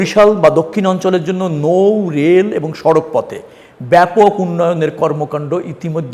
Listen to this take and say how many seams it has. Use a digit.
0